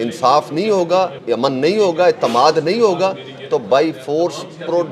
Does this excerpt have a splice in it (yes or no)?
yes